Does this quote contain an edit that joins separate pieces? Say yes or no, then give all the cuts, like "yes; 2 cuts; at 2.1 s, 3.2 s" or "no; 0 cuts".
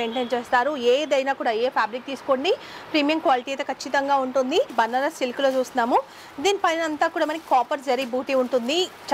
yes; 1 cut; at 4.7 s